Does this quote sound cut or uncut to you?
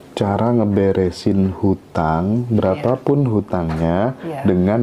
uncut